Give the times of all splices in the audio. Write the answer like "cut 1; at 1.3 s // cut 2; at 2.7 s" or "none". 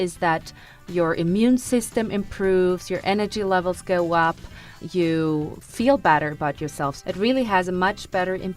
cut 1; at 4.7 s // cut 2; at 5.6 s // cut 3; at 7.0 s